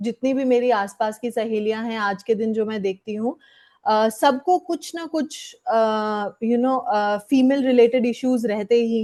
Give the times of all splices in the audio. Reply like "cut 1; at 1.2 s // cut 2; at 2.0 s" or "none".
none